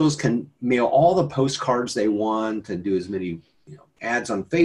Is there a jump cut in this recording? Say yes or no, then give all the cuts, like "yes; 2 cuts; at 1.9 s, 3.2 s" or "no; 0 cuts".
no; 0 cuts